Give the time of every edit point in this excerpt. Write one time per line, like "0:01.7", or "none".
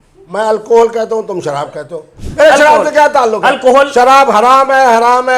0:02.2